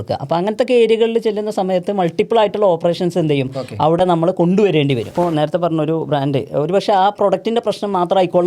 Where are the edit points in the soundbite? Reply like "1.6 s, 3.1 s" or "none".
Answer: 5.1 s